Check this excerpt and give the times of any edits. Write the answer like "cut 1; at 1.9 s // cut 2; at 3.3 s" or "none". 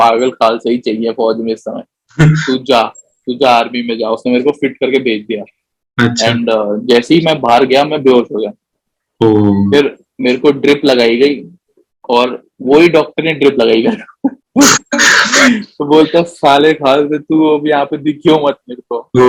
none